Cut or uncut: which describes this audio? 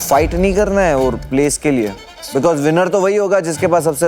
uncut